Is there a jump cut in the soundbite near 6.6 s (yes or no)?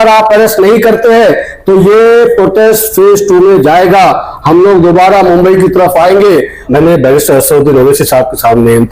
yes